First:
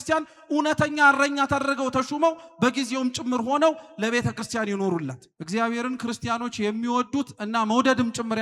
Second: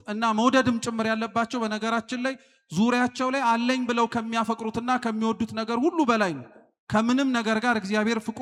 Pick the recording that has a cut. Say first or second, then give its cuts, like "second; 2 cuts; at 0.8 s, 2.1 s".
first; 1 cut; at 5.3 s